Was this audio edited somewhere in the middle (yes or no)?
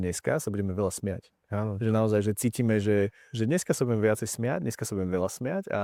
no